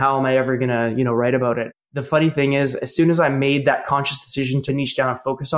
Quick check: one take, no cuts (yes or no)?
no